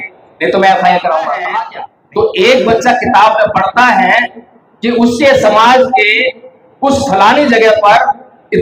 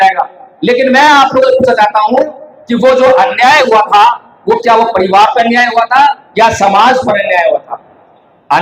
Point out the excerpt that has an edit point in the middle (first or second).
first